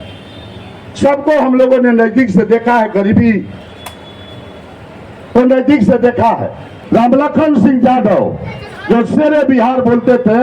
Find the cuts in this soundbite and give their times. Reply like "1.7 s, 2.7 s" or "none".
6.7 s